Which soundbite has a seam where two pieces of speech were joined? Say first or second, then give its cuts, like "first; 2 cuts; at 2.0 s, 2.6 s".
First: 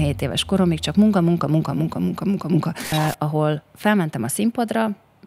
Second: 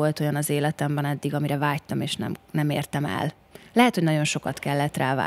first; 1 cut; at 2.9 s